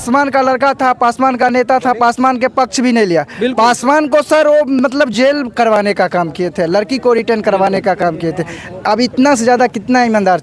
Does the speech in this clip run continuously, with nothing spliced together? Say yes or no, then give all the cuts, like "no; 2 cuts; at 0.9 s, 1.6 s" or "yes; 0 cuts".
yes; 0 cuts